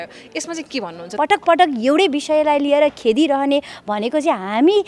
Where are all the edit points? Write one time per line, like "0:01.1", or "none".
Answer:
0:01.1

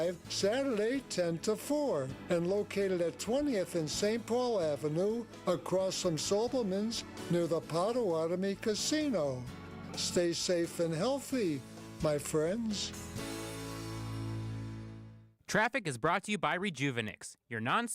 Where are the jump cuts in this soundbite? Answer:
0:15.2

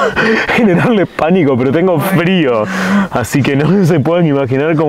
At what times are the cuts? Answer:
none

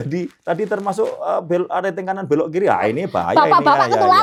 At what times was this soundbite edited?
none

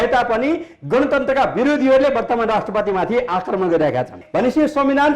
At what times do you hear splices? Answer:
0:04.2

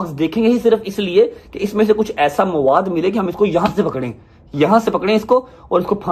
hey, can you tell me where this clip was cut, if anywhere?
none

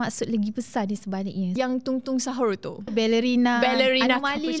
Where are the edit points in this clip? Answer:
0:01.6
0:02.9

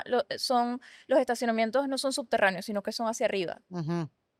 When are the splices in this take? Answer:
none

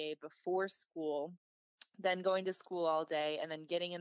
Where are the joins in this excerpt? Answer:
none

